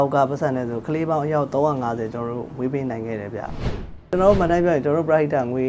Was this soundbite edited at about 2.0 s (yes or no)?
no